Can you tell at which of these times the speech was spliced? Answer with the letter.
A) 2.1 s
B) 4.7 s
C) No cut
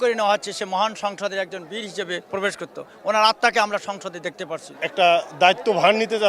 B